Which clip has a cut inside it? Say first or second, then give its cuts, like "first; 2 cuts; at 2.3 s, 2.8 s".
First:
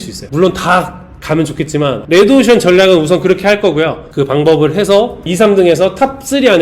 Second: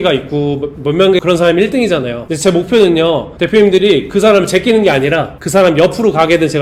first; 3 cuts; at 2.0 s, 4.0 s, 5.3 s